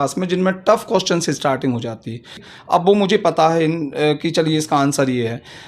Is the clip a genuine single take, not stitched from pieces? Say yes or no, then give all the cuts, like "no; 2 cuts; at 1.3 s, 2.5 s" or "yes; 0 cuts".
no; 1 cut; at 2.5 s